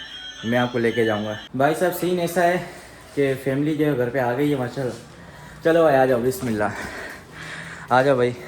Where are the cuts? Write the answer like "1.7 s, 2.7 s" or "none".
1.4 s

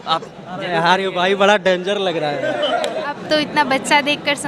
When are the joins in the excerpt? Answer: 3.1 s

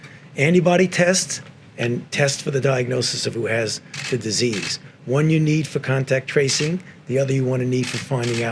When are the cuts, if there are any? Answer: none

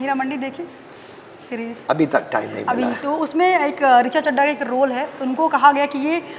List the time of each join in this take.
none

